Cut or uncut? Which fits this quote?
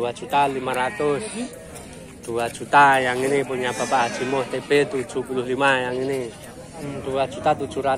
cut